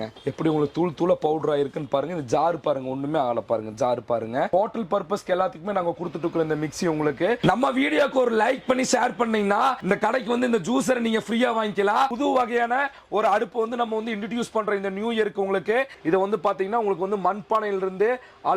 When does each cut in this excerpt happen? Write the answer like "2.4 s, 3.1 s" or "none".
4.5 s, 7.4 s, 12.1 s, 15.9 s